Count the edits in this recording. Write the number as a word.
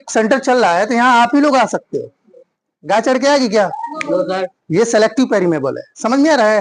zero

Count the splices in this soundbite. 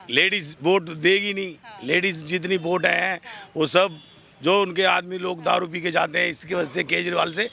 zero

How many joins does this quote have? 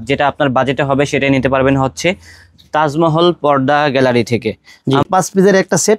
one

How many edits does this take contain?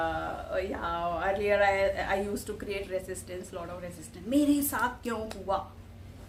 zero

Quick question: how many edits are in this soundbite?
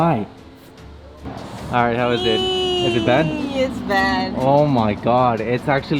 one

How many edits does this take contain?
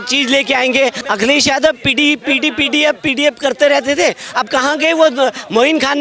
one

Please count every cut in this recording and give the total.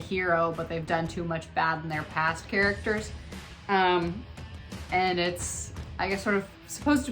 zero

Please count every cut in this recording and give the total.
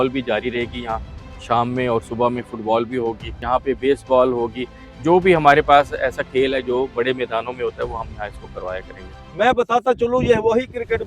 two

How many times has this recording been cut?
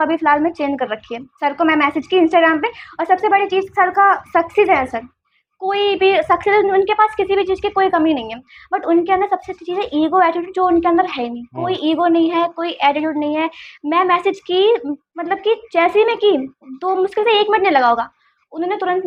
zero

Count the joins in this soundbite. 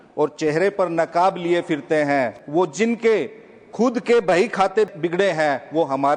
two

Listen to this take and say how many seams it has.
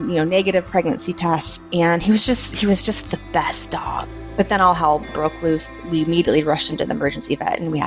two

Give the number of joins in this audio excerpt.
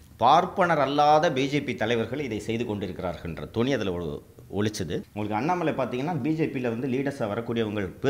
one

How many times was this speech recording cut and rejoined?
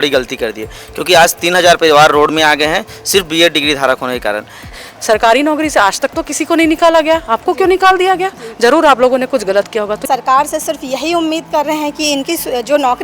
two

